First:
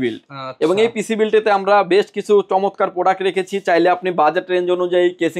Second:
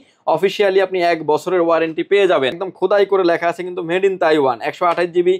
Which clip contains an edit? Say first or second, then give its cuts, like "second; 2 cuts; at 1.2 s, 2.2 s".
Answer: second; 1 cut; at 2.7 s